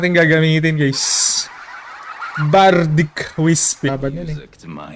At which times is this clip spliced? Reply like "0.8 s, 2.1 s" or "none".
3.9 s